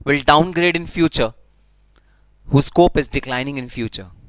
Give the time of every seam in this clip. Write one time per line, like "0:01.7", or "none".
none